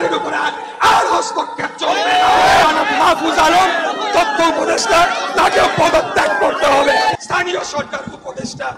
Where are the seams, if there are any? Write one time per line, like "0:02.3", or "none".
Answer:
0:02.6
0:07.2